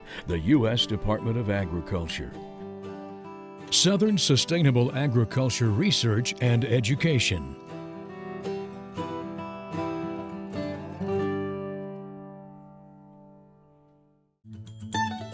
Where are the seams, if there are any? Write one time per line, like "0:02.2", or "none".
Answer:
0:07.5
0:14.4